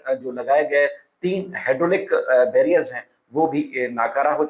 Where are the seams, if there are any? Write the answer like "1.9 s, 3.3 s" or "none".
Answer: none